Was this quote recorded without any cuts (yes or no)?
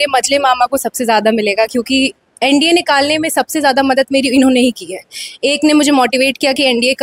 yes